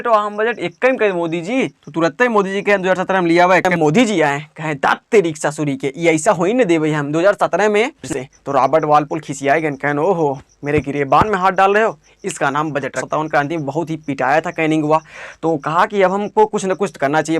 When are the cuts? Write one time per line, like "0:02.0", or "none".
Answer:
0:03.7
0:08.1
0:13.0